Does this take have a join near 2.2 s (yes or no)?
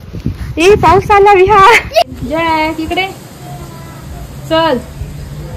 yes